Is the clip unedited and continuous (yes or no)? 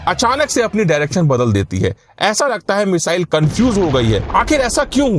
no